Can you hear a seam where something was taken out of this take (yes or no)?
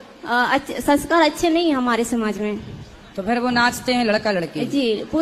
no